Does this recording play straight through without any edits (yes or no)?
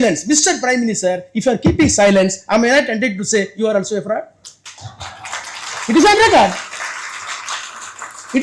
yes